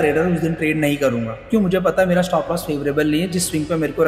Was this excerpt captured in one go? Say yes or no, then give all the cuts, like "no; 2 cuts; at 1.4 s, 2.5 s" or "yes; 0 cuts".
yes; 0 cuts